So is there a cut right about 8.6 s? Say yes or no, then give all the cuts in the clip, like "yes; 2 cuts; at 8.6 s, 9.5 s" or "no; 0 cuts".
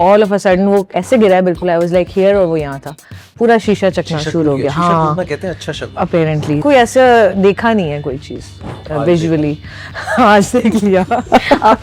no; 1 cut; at 6.6 s